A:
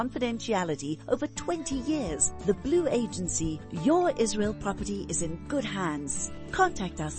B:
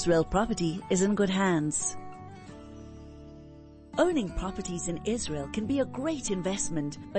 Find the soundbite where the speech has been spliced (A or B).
B